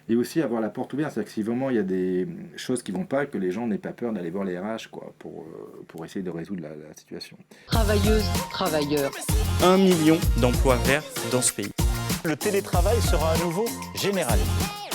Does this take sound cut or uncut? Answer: cut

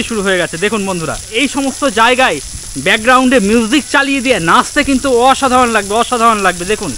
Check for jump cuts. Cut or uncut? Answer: cut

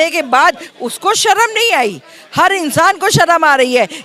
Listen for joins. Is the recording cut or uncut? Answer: uncut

